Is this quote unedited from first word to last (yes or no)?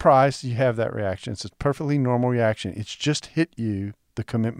yes